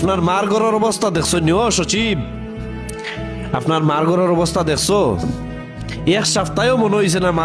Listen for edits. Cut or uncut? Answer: uncut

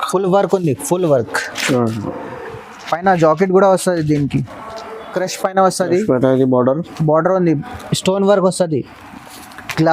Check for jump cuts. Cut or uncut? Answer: cut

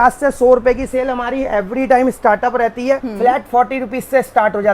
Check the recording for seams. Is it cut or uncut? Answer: cut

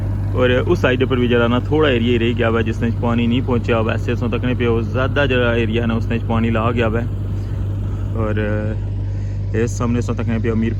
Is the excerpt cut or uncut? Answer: uncut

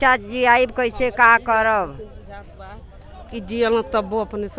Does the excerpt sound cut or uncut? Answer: uncut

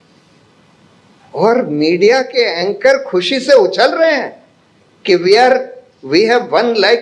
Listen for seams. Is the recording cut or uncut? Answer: uncut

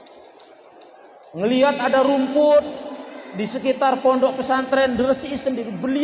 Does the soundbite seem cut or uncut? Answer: uncut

